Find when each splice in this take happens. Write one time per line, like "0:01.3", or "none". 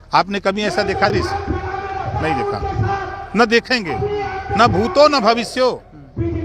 0:01.1